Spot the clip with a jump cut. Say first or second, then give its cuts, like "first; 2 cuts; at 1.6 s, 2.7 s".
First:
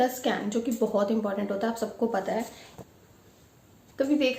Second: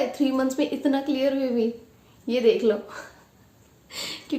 first; 1 cut; at 2.6 s